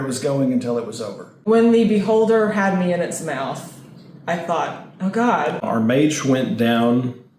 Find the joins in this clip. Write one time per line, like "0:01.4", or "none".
0:01.4
0:05.6